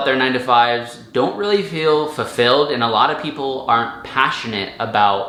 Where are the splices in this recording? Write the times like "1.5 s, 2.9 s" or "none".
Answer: none